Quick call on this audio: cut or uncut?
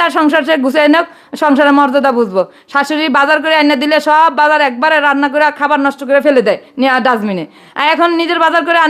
uncut